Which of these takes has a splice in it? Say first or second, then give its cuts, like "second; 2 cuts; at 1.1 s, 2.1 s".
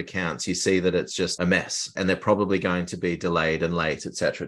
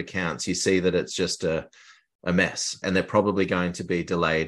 first; 1 cut; at 1.3 s